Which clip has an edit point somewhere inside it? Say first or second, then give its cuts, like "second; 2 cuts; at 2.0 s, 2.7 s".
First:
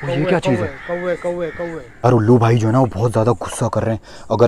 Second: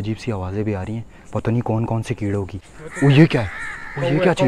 first; 1 cut; at 2.0 s